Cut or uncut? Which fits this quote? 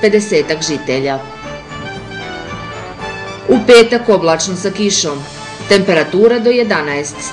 cut